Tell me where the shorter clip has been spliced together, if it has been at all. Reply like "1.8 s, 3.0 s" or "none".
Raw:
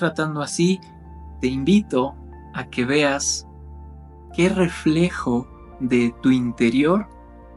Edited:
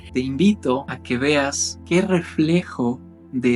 0.9 s, 1.7 s